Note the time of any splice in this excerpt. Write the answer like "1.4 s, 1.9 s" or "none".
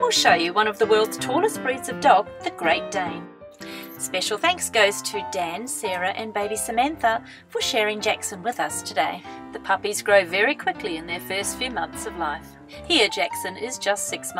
none